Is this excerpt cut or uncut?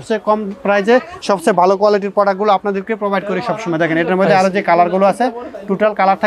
uncut